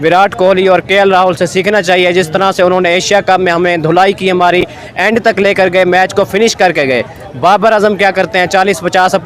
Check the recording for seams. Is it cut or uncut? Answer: uncut